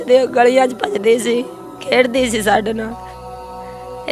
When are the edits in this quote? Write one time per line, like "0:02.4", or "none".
none